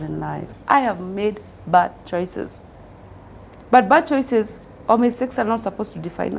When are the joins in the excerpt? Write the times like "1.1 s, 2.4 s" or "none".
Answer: none